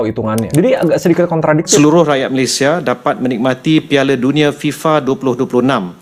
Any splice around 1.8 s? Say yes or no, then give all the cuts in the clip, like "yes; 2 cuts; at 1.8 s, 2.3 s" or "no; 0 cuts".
yes; 1 cut; at 1.8 s